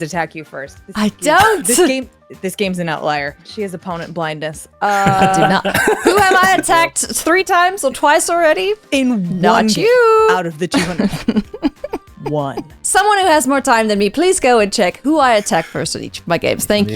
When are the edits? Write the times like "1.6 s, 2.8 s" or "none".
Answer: 3.4 s, 12.9 s